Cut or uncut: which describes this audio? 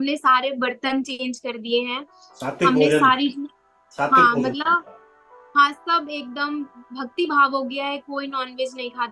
uncut